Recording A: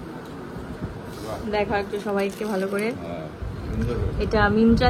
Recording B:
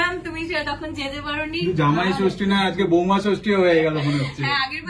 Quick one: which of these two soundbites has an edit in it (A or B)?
B